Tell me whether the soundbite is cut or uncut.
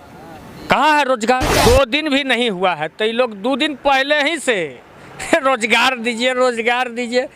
cut